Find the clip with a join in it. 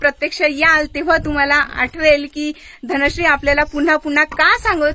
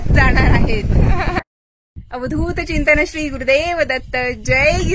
second; 1 cut; at 1.4 s

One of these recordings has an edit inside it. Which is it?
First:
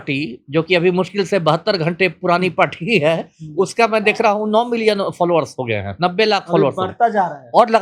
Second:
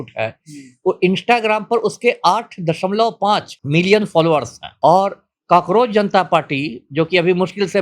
second; 2 cuts; at 3.5 s, 4.6 s

